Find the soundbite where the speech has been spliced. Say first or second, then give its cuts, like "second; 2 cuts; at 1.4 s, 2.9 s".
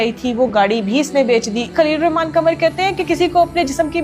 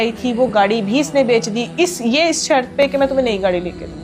first; 1 cut; at 1.7 s